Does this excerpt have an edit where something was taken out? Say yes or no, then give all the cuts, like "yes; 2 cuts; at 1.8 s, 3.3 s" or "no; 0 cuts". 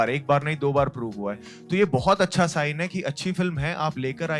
no; 0 cuts